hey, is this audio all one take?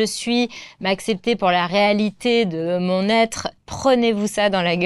no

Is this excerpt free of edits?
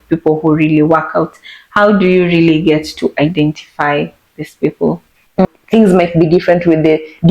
no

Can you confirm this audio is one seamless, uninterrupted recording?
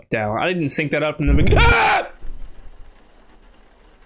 yes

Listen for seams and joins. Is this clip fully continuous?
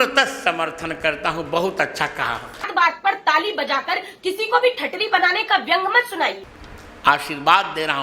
no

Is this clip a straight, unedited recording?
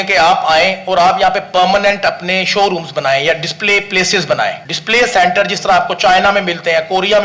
no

